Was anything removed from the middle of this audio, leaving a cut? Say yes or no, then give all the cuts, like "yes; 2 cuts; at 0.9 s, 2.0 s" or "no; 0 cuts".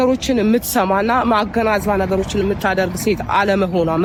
no; 0 cuts